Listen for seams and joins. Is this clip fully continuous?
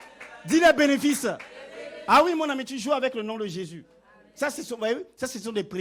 yes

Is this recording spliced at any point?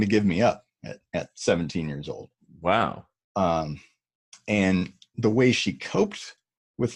no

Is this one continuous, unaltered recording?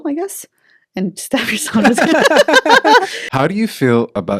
no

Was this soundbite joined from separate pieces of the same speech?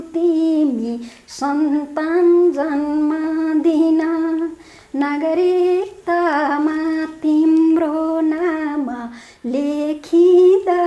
no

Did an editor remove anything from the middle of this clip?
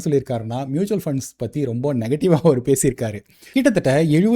yes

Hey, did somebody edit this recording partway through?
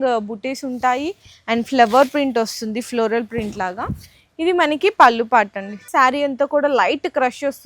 yes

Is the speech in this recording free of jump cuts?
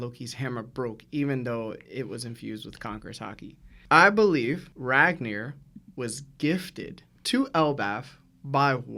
yes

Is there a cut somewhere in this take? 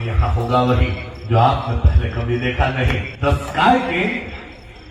yes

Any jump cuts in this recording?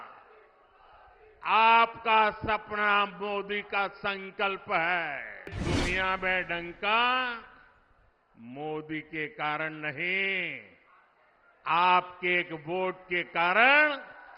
yes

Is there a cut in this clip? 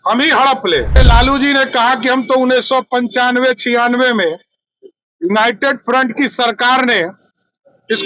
yes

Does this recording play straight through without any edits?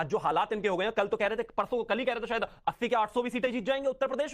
yes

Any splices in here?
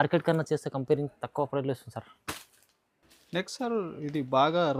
no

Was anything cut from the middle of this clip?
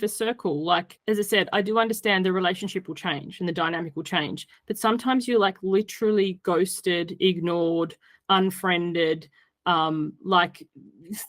yes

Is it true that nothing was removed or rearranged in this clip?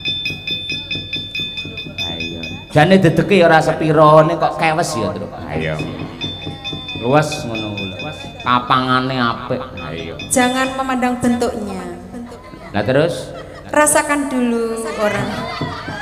yes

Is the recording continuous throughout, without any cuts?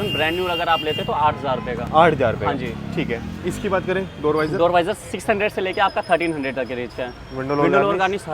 yes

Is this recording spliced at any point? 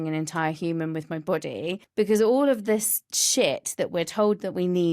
yes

